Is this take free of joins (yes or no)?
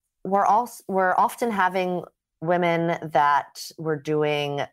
yes